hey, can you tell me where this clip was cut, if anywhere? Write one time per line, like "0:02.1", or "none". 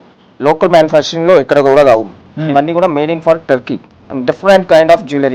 0:04.0